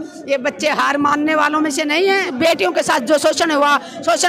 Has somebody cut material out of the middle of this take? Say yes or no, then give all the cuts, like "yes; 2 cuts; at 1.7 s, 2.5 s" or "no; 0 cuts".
yes; 1 cut; at 2.3 s